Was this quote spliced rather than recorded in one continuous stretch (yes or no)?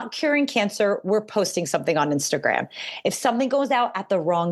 no